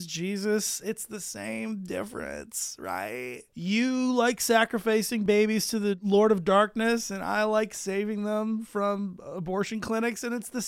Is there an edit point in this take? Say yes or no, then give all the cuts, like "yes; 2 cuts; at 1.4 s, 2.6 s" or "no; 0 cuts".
yes; 2 cuts; at 3.5 s, 5.4 s